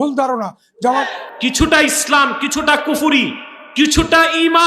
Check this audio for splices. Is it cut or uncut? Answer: cut